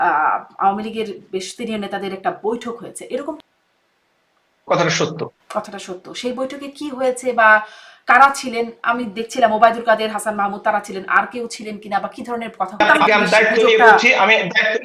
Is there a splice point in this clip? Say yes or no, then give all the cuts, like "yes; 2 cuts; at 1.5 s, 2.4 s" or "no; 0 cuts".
yes; 2 cuts; at 3.4 s, 12.8 s